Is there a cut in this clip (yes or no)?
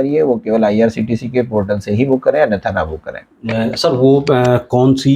no